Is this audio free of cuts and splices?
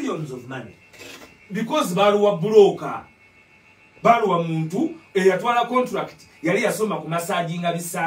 yes; 0 cuts

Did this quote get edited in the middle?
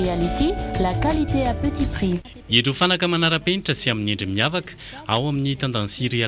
no; 0 cuts

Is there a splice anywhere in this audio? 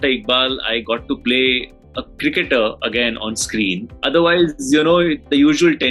yes; 1 cut; at 3.9 s

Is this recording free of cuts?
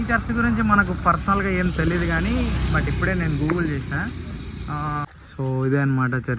no; 1 cut; at 5.3 s

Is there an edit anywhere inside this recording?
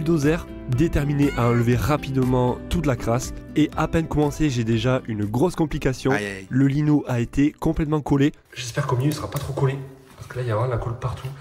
no; 0 cuts

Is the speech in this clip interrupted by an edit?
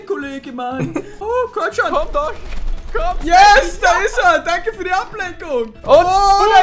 yes; 2 cuts; at 1.2 s, 5.8 s

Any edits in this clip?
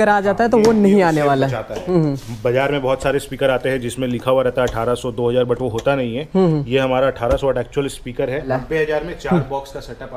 yes; 2 cuts; at 1.8 s, 8.5 s

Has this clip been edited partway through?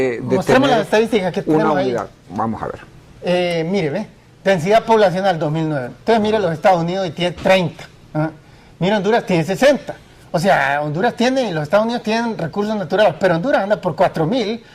yes; 1 cut; at 4.9 s

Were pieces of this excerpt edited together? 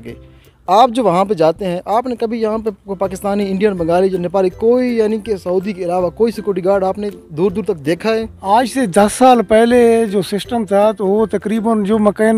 no; 0 cuts

